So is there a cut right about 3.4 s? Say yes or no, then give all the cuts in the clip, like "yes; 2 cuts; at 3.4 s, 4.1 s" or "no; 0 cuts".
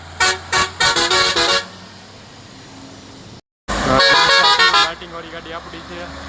yes; 1 cut; at 3.4 s